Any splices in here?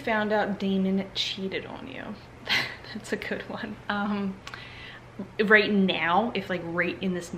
no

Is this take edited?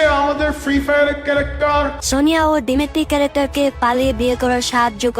yes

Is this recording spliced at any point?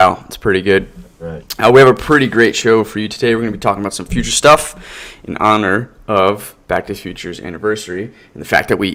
no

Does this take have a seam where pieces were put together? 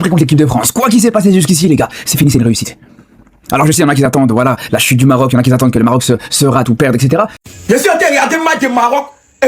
yes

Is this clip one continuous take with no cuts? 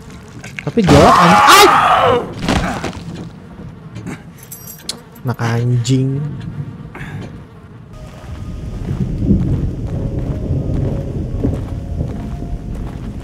yes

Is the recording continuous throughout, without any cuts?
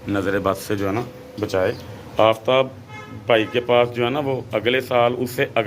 no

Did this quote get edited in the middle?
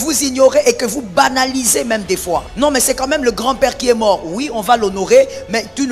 yes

